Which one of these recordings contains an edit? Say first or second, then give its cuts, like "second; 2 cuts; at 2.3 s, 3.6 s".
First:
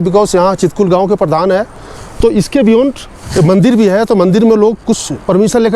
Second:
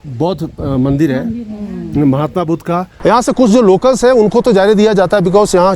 second; 1 cut; at 2.9 s